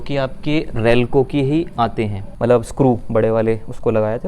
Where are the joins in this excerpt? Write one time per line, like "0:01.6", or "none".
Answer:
0:02.2